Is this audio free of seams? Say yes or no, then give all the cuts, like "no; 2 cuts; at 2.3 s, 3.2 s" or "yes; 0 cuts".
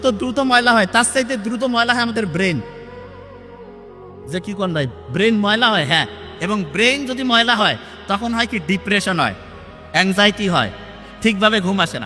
yes; 0 cuts